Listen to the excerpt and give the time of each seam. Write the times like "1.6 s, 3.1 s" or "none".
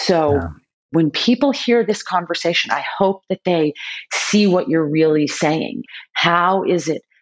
0.9 s, 5.9 s